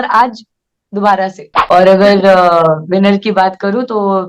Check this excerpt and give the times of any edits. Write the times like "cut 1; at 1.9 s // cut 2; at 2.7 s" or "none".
cut 1; at 1.5 s